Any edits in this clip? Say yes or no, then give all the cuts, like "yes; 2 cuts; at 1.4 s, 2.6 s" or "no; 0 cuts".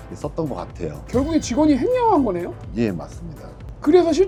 no; 0 cuts